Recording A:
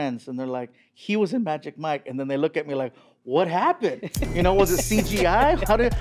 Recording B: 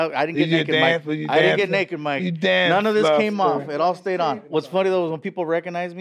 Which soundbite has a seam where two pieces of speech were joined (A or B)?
B